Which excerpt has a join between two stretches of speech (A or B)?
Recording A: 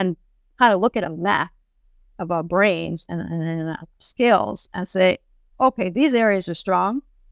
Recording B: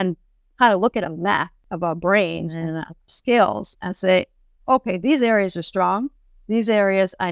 B